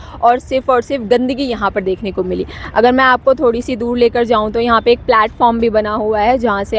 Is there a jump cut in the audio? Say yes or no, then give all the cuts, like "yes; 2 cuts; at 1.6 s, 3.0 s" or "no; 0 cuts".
no; 0 cuts